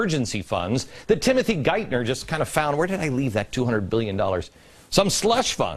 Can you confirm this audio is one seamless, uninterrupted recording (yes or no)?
yes